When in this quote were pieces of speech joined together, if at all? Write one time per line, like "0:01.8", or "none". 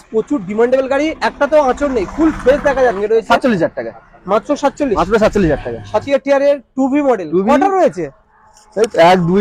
0:03.0
0:06.1